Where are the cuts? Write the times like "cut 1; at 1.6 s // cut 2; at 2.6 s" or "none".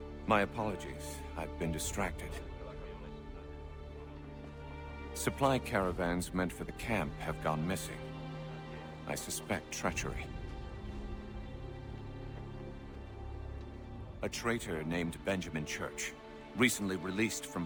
none